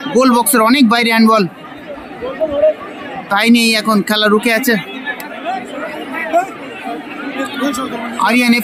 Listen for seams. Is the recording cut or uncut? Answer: uncut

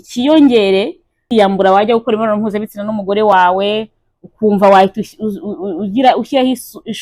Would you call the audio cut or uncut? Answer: cut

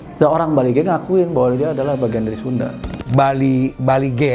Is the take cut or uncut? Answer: cut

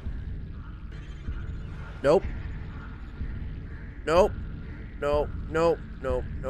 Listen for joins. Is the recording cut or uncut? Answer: cut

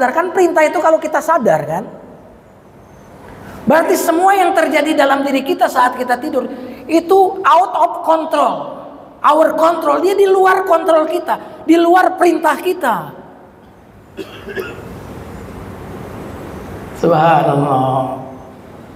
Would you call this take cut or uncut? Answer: uncut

